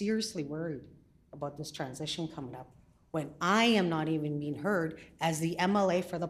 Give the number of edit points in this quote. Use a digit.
0